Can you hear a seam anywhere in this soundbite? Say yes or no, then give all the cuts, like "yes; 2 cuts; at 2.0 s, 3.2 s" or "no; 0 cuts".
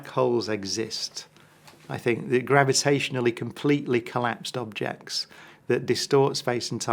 no; 0 cuts